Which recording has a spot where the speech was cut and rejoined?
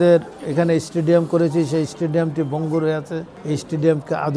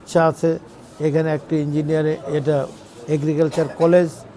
first; 1 cut; at 3.3 s

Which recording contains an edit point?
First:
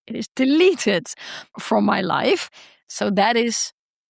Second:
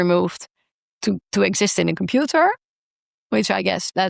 first; 1 cut; at 2.7 s

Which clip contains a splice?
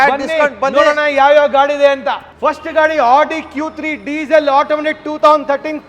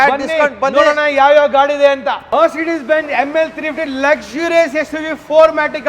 second; 1 cut; at 2.2 s

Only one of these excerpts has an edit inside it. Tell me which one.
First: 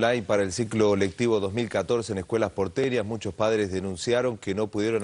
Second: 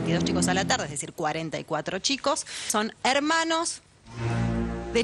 second; 1 cut; at 2.7 s

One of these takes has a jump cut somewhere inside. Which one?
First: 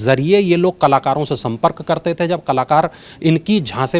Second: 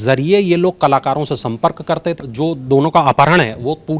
second; 1 cut; at 2.2 s

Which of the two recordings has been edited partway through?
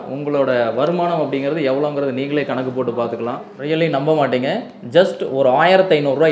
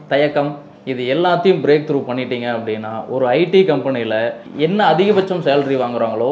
first; 1 cut; at 3.4 s

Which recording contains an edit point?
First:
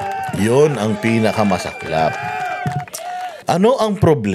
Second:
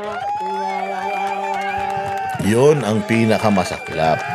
first; 1 cut; at 3.3 s

